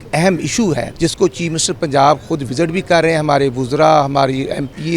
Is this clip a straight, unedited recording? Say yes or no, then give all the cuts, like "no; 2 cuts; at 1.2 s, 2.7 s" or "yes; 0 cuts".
no; 1 cut; at 0.9 s